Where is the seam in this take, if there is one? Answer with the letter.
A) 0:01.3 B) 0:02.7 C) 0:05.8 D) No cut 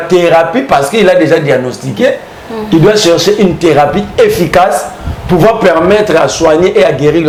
D